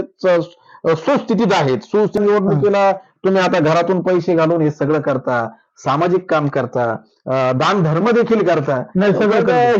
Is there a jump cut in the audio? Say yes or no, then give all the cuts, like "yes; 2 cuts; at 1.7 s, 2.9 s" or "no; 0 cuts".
yes; 1 cut; at 2.2 s